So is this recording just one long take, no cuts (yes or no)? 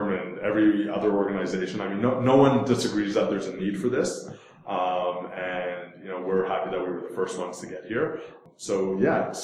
no